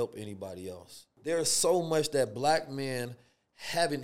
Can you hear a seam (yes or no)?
yes